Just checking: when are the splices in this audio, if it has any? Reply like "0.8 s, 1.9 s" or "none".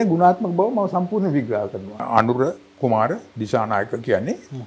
1.9 s